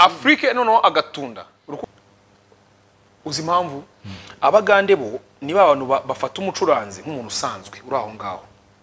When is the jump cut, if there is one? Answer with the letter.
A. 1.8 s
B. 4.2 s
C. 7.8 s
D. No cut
A